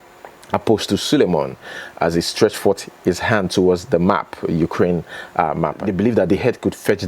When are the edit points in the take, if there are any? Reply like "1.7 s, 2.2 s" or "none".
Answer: 5.8 s

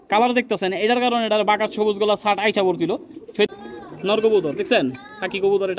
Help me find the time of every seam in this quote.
3.5 s

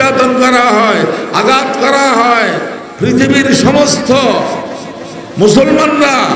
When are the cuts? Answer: 2.8 s

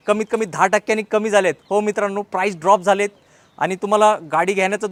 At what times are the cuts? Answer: none

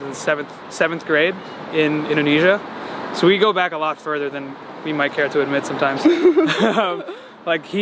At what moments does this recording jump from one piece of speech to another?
none

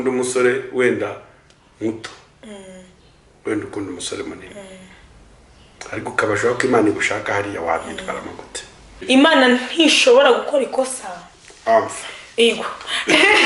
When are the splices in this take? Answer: 9.0 s

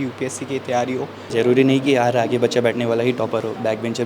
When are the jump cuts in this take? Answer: 1.3 s

